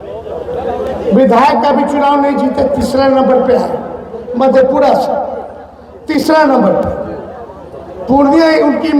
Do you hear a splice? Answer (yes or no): no